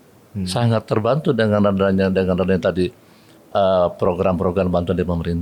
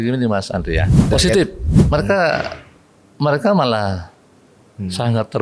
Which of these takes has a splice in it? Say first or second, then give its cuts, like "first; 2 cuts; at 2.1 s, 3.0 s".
second; 1 cut; at 1.0 s